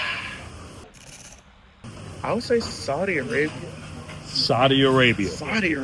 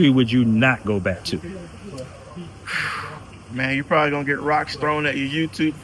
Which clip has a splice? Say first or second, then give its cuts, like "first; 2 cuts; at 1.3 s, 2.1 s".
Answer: first; 1 cut; at 1.3 s